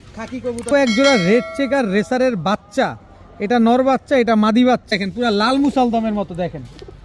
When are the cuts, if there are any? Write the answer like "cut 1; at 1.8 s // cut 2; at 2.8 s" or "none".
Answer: cut 1; at 0.7 s // cut 2; at 4.9 s

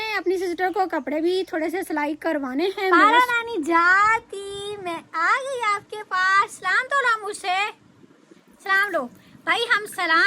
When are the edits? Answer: cut 1; at 3.0 s

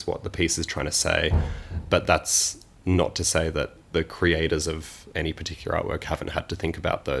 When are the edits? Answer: cut 1; at 1.8 s // cut 2; at 3.8 s // cut 3; at 5.0 s

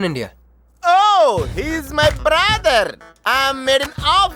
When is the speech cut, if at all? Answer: none

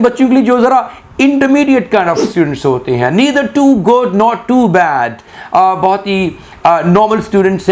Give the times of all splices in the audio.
none

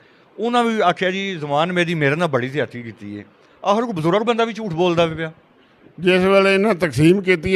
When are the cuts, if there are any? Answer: none

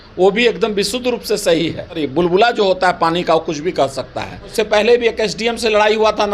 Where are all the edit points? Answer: cut 1; at 2.0 s // cut 2; at 4.5 s

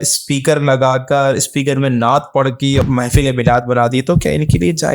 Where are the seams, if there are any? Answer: cut 1; at 2.8 s

